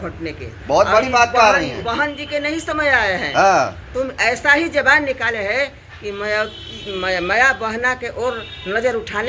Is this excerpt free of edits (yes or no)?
yes